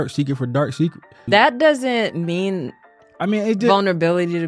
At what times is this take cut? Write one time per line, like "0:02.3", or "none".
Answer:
0:01.2